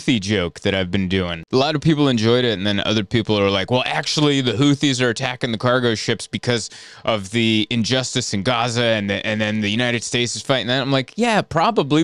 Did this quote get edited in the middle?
yes; 1 cut; at 1.4 s

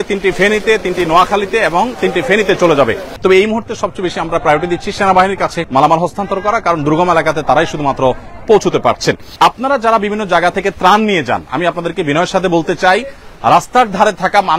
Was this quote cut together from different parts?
yes; 3 cuts; at 3.1 s, 5.6 s, 9.3 s

